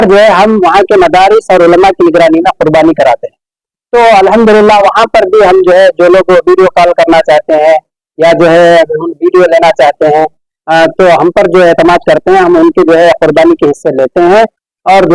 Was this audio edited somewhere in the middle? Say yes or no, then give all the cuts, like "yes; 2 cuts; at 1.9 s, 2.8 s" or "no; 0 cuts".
no; 0 cuts